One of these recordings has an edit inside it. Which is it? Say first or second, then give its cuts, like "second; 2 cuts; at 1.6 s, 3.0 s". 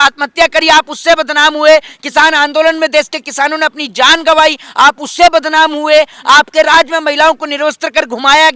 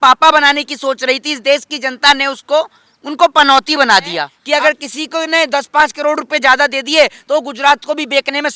second; 1 cut; at 4.3 s